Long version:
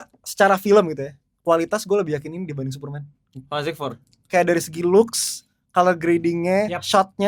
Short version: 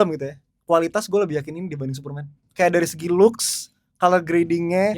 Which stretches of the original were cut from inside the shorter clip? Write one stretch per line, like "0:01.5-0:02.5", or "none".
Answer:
0:03.1-0:04.1